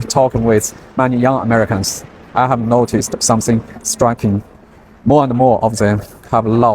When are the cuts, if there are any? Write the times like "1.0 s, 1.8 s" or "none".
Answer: none

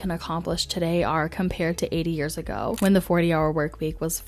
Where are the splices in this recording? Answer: 2.8 s

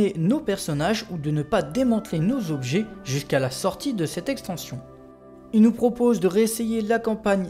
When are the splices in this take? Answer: 5.3 s

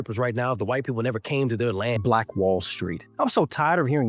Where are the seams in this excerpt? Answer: 2.0 s

